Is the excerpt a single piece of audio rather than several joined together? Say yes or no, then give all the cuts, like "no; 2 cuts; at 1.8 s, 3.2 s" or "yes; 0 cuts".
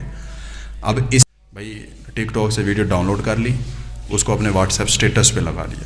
no; 1 cut; at 1.3 s